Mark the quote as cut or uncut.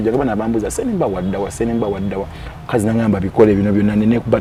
uncut